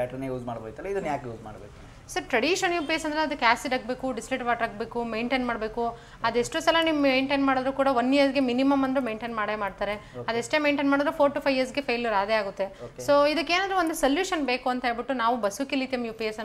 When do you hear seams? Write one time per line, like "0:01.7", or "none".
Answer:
none

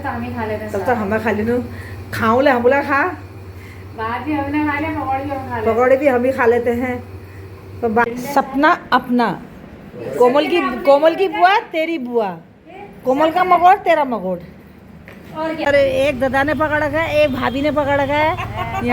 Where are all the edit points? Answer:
0:08.1
0:15.6

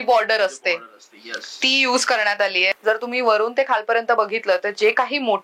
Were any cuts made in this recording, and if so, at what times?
0:02.7

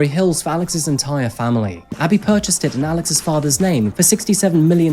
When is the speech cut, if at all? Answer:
0:02.0
0:03.9

